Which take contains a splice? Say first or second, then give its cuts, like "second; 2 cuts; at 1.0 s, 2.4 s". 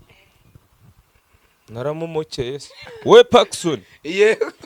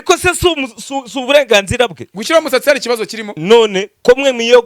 first; 1 cut; at 2.8 s